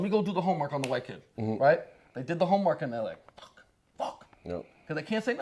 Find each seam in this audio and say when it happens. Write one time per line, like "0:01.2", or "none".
0:03.9